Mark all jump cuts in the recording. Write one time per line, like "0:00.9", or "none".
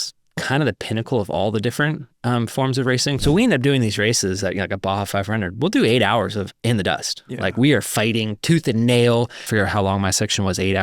0:03.2
0:09.4